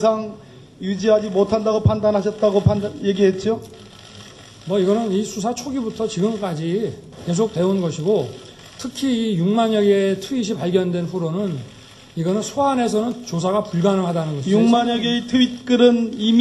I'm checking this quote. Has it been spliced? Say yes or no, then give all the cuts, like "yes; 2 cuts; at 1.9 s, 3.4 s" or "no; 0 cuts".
yes; 1 cut; at 14.4 s